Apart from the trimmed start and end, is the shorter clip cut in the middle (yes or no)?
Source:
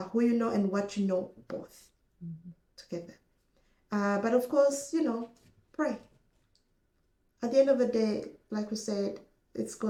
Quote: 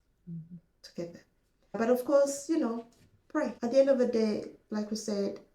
yes